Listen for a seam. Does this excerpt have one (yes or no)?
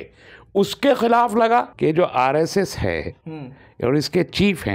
yes